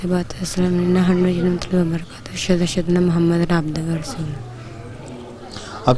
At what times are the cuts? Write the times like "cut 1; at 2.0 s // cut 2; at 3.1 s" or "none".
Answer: none